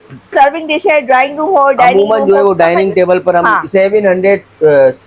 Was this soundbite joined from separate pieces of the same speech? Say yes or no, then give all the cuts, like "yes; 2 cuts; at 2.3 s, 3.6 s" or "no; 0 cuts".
yes; 1 cut; at 3.6 s